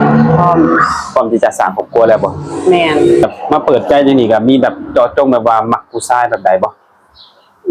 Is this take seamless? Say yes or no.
no